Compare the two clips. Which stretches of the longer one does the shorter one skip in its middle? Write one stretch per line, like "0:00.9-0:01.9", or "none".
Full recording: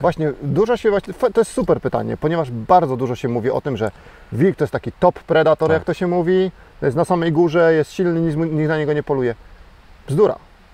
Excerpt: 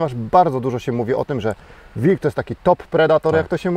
none